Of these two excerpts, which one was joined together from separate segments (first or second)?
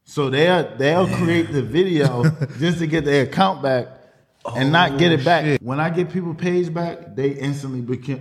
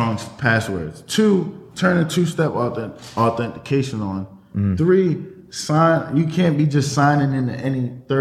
first